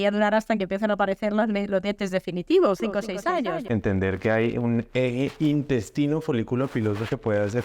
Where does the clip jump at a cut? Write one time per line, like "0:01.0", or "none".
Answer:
0:03.6